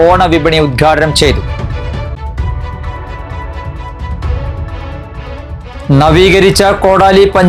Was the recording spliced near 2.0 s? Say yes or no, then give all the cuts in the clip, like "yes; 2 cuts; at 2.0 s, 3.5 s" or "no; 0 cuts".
no; 0 cuts